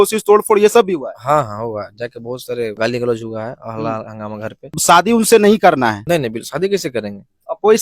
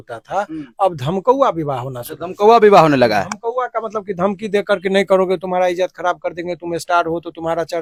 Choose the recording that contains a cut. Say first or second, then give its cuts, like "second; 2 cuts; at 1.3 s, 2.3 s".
first; 3 cuts; at 2.7 s, 4.8 s, 6.0 s